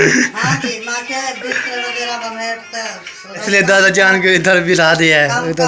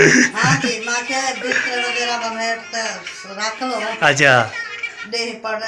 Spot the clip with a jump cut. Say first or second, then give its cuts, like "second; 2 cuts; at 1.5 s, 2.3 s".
first; 1 cut; at 3.4 s